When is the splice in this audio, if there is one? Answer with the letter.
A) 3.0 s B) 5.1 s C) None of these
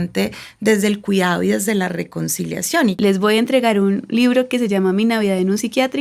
A